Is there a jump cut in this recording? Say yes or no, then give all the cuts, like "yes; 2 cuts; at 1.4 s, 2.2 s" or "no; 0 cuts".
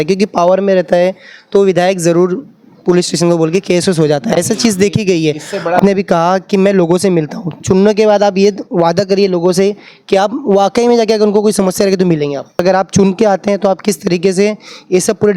yes; 2 cuts; at 5.8 s, 12.6 s